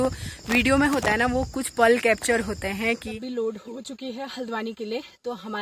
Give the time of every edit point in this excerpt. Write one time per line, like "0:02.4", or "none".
0:03.1